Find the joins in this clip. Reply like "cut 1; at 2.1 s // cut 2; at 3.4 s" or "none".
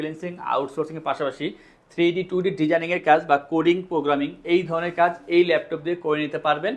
none